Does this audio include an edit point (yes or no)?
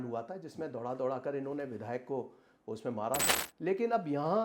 yes